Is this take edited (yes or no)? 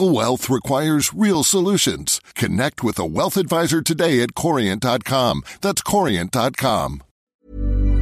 yes